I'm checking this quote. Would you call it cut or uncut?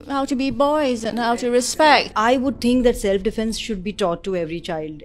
cut